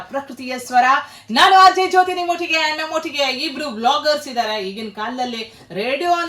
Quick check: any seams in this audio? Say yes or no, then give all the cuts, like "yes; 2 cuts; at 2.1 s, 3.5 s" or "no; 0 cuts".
no; 0 cuts